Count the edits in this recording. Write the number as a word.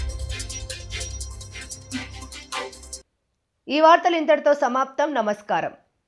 zero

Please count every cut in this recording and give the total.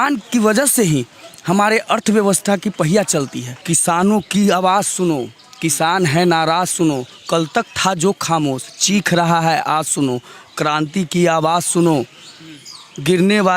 one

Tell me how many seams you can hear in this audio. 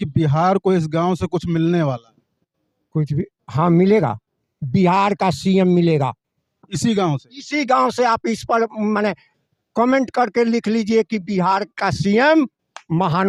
zero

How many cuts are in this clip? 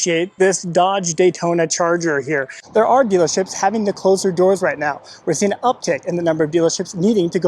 one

